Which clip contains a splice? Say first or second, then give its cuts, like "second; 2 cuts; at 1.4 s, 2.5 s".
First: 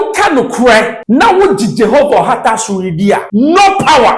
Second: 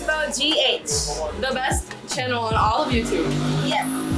first; 2 cuts; at 1.0 s, 3.3 s